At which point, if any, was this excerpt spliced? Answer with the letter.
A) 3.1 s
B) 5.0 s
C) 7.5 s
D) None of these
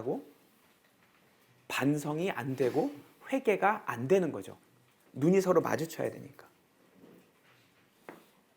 D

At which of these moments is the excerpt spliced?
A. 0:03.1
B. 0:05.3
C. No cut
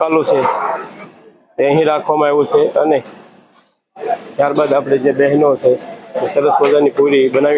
C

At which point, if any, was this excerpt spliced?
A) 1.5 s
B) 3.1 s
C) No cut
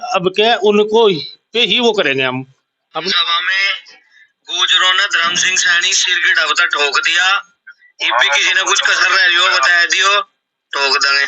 B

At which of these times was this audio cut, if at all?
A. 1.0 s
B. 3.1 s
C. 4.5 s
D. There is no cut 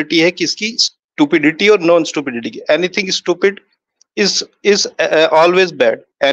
D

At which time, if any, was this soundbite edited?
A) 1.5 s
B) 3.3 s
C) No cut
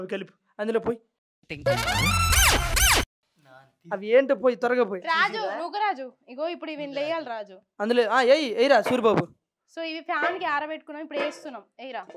C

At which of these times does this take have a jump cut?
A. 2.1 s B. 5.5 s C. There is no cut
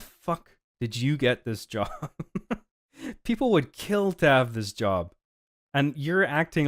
C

